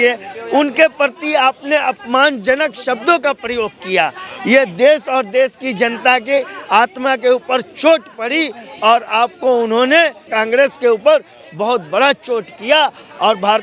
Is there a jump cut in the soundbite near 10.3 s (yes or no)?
yes